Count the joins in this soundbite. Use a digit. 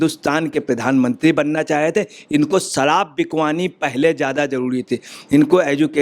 0